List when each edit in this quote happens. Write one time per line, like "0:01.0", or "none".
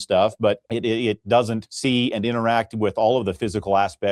0:01.7